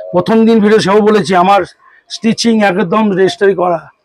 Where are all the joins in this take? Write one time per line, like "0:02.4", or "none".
none